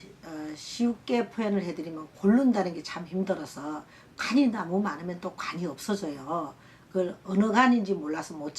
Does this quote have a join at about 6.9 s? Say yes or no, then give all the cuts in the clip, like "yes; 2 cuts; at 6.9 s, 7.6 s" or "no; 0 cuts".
yes; 1 cut; at 6.9 s